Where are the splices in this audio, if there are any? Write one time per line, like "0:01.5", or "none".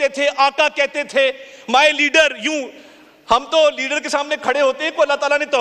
none